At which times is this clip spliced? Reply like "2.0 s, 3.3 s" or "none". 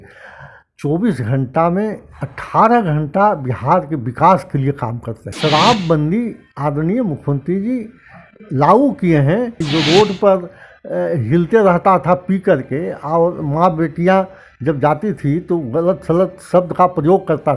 5.3 s, 9.6 s